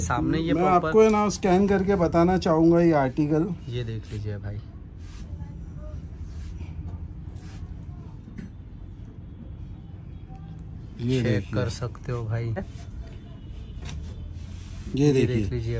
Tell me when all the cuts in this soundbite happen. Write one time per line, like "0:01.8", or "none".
0:12.8